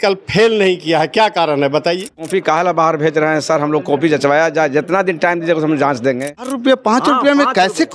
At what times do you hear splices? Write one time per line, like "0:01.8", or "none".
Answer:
0:02.3
0:06.5